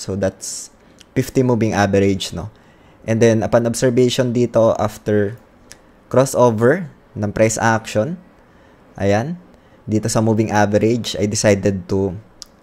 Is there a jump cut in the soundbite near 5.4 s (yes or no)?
no